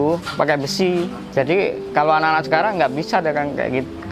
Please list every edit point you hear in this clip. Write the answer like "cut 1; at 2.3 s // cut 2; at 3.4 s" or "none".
cut 1; at 1.2 s